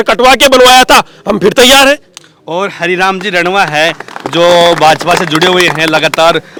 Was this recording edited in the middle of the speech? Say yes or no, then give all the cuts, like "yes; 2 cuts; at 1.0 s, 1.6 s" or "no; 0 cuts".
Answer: no; 0 cuts